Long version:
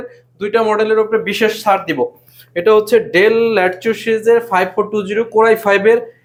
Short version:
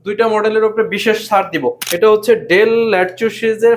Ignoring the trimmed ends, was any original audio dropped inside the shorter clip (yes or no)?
yes